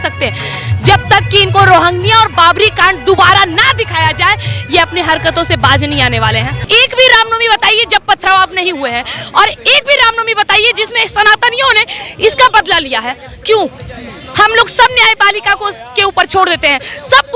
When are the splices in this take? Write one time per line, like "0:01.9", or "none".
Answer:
0:06.6